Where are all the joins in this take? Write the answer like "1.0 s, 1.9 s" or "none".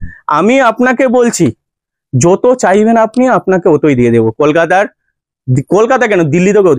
none